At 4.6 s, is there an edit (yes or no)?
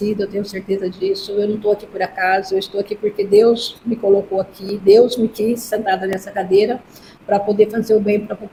no